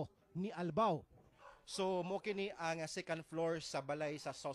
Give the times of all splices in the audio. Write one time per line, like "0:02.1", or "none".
0:03.4